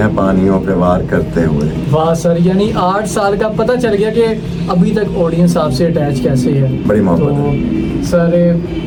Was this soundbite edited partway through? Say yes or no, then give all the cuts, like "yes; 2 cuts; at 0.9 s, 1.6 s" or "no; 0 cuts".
no; 0 cuts